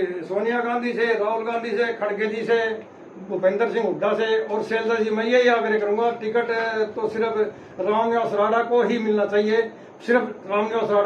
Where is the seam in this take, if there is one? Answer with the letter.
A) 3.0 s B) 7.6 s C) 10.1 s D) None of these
D